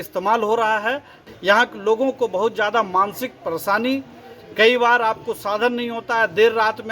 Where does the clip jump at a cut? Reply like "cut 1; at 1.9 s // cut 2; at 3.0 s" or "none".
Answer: cut 1; at 1.2 s